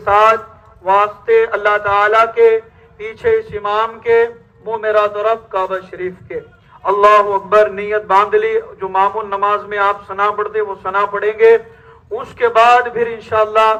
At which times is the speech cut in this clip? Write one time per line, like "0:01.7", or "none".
none